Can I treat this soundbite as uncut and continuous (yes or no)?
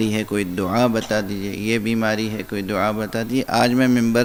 yes